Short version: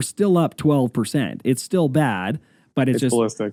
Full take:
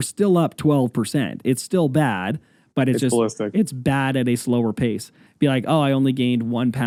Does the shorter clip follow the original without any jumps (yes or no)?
yes